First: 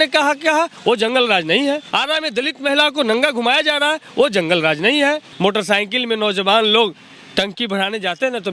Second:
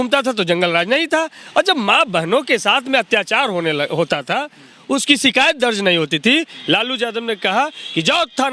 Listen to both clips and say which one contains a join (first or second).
first